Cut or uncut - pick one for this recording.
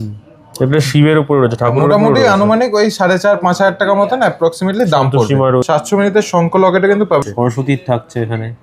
cut